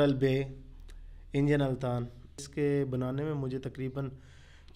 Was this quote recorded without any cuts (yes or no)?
no